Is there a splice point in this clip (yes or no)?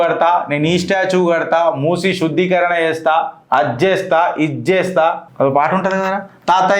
yes